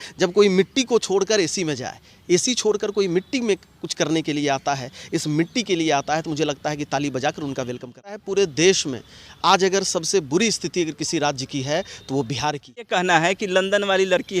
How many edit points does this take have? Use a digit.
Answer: 2